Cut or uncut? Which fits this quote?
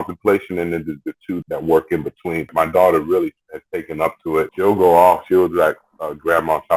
cut